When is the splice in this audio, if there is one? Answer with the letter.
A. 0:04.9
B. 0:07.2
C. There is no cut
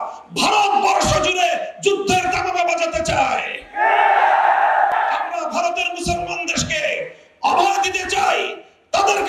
A